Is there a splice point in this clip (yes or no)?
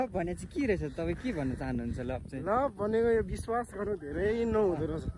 no